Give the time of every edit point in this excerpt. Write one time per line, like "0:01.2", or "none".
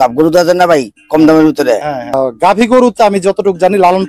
0:02.2